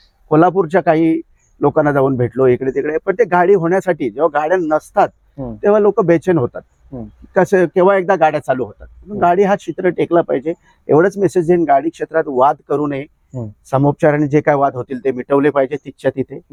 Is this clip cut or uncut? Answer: uncut